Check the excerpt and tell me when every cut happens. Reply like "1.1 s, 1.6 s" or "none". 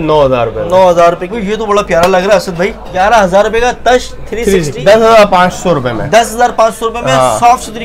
1.3 s, 2.9 s, 4.8 s